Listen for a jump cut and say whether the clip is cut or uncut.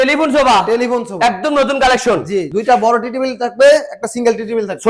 uncut